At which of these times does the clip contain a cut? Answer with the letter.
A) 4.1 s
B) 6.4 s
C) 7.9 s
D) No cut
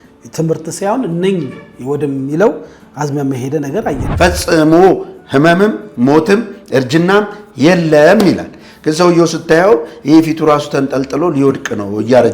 A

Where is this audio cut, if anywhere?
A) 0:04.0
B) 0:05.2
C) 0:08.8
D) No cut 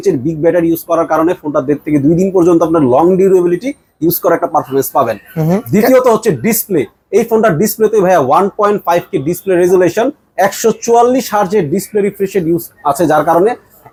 D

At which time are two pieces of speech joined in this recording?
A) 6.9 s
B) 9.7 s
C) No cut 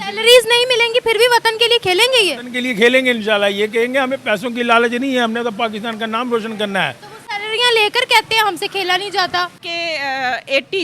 B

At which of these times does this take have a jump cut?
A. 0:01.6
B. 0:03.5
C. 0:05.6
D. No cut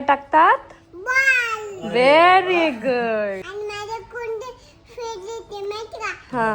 B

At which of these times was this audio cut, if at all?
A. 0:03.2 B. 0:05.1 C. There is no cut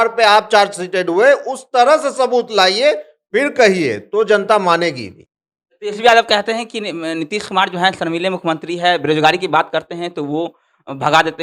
C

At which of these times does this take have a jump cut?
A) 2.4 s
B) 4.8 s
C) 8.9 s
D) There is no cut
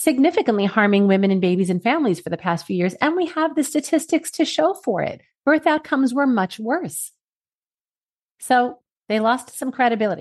C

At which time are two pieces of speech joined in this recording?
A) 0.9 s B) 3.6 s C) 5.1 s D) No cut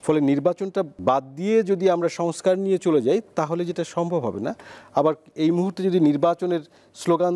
A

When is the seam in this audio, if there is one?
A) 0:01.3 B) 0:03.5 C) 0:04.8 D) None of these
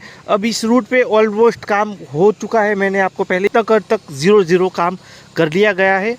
B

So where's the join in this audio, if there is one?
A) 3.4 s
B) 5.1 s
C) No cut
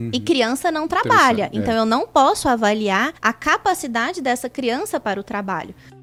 C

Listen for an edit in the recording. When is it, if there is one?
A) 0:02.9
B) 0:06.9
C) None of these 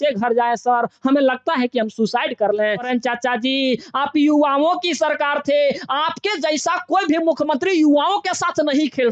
A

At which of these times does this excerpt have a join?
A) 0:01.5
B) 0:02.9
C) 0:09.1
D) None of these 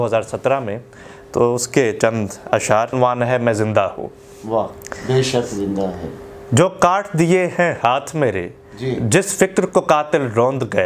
B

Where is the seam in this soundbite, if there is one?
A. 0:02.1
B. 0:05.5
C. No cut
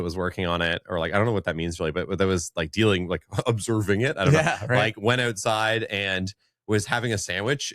C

